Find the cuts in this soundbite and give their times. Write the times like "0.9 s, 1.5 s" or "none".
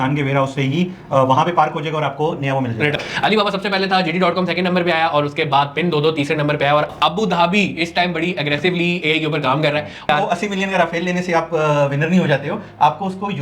3.0 s, 6.9 s, 10.1 s